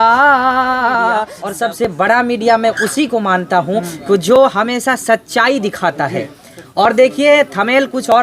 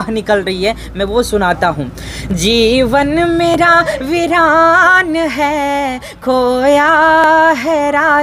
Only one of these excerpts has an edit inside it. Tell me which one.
first; 1 cut; at 1.4 s

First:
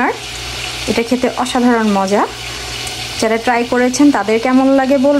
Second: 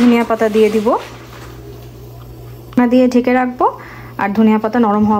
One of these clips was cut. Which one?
second; 1 cut; at 2.6 s

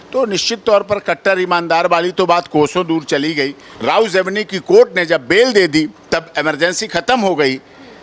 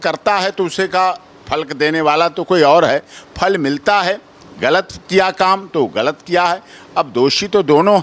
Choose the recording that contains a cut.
first; 1 cut; at 3.7 s

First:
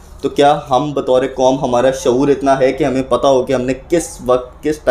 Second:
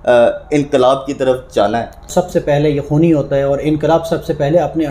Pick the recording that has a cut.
second; 1 cut; at 2.1 s

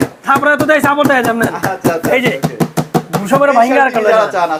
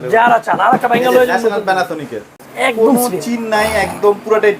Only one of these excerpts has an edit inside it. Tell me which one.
second; 1 cut; at 2.2 s

